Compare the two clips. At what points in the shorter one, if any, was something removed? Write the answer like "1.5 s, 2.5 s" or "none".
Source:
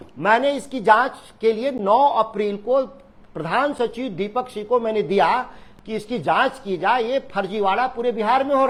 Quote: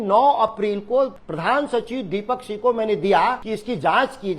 1.2 s, 3.5 s